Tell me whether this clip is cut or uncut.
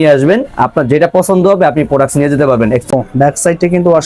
cut